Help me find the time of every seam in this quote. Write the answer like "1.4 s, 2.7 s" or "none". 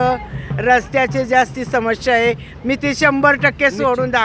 none